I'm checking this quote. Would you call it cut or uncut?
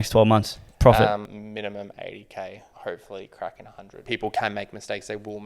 cut